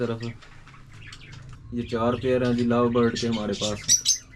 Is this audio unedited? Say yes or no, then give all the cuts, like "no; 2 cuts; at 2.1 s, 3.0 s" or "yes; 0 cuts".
no; 1 cut; at 1.6 s